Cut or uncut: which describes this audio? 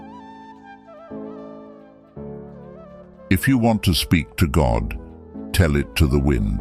cut